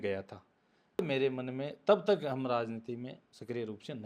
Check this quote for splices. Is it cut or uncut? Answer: cut